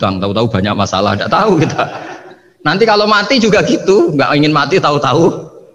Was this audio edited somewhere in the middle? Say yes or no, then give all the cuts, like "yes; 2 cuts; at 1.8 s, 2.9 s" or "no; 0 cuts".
no; 0 cuts